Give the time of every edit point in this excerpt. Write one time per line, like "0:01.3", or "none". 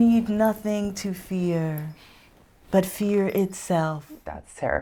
none

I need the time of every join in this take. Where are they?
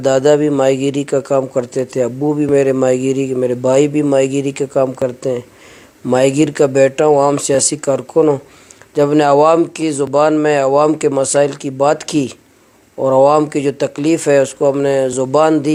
none

